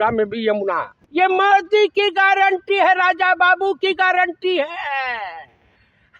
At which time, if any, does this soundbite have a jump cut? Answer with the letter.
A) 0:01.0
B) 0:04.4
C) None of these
A